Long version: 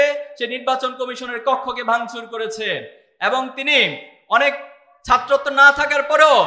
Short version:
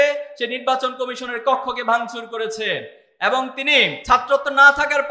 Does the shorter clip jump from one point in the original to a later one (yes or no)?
yes